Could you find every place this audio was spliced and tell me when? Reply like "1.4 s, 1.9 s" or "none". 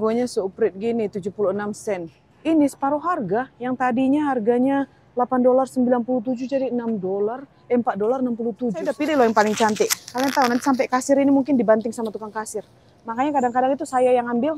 2.3 s, 8.9 s

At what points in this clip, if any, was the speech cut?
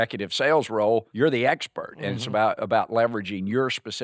1.1 s

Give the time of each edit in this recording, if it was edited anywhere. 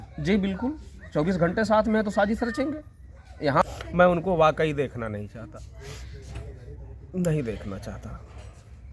3.6 s

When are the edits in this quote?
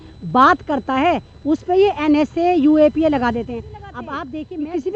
4.1 s

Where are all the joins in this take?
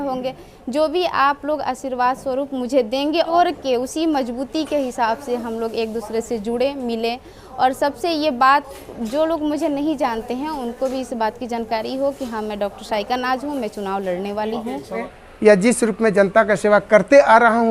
3.3 s, 15.2 s

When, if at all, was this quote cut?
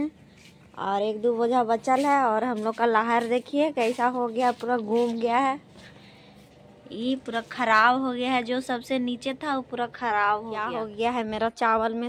10.8 s

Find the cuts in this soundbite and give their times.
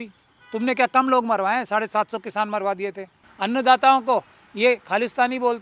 3.2 s

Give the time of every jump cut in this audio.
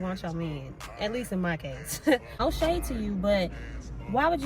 2.3 s

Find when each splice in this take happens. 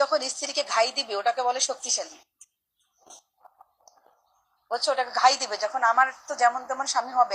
none

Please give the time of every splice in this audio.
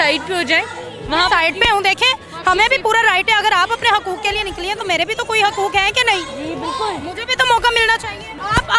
none

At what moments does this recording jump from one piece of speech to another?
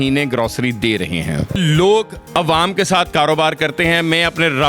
1.6 s

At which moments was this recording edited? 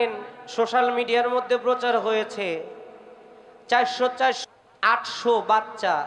4.4 s

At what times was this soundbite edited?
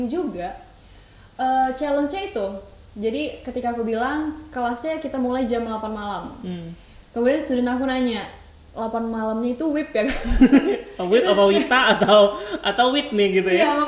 none

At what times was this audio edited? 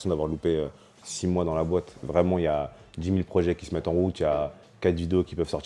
none

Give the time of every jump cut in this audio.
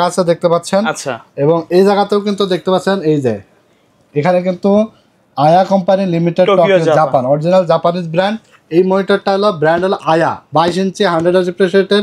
none

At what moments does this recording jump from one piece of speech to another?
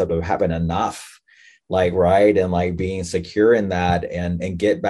none

